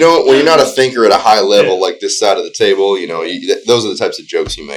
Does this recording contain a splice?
no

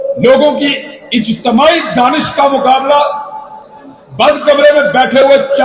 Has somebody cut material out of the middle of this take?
no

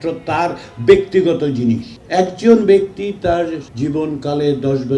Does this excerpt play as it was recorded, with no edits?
no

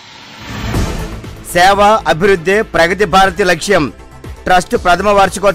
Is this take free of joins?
no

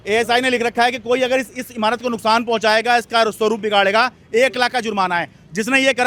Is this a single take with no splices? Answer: yes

